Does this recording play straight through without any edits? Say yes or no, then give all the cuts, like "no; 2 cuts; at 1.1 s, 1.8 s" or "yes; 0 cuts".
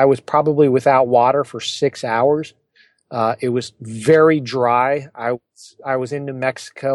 yes; 0 cuts